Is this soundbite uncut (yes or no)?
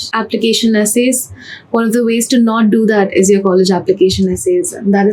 yes